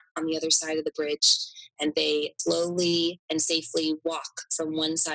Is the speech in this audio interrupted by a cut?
yes; 1 cut; at 2.3 s

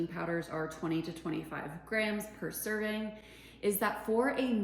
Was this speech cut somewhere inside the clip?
no; 0 cuts

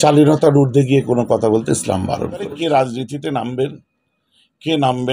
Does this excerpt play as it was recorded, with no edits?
no; 1 cut; at 2.5 s

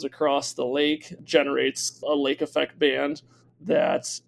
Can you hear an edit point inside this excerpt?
yes; 1 cut; at 2.0 s

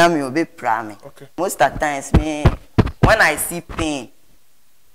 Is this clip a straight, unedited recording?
no; 1 cut; at 1.3 s

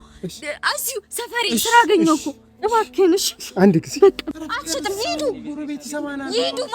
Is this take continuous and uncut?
no; 1 cut; at 4.2 s

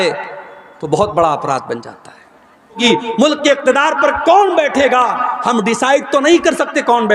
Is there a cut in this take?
yes; 1 cut; at 2.8 s

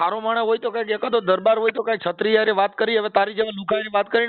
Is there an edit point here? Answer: no; 0 cuts

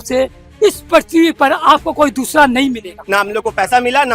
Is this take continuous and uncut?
no; 1 cut; at 3.0 s

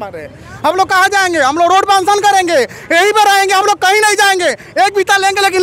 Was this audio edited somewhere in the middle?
no; 0 cuts

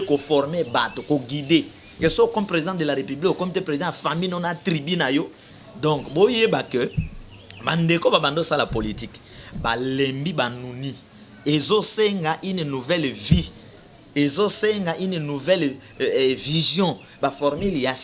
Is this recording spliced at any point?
yes; 1 cut; at 5.4 s

